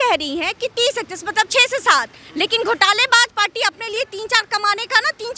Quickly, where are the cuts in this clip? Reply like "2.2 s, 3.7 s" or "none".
none